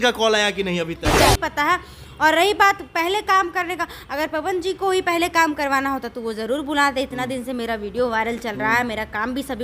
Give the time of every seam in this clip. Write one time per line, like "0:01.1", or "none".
0:01.2